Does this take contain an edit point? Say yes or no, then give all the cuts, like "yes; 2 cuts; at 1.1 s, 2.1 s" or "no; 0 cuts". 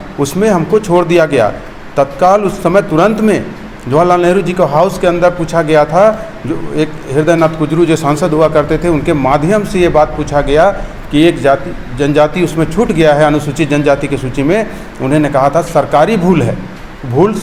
no; 0 cuts